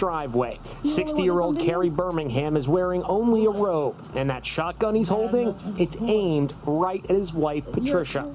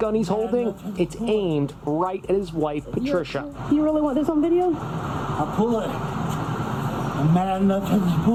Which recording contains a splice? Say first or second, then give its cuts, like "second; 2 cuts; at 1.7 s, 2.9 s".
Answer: first; 1 cut; at 3.6 s